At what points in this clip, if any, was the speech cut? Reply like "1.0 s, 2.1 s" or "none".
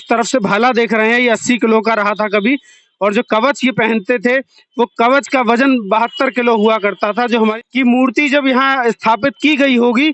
7.6 s